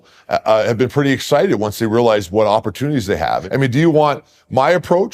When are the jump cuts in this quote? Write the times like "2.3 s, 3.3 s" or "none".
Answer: 3.4 s